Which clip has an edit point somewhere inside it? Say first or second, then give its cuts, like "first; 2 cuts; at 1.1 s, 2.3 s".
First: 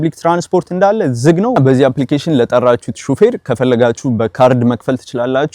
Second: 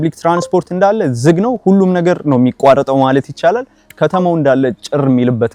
first; 1 cut; at 1.6 s